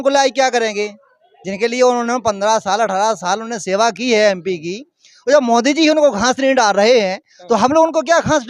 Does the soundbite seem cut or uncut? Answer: uncut